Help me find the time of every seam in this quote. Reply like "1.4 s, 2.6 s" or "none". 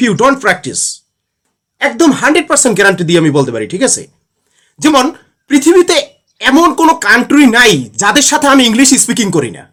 none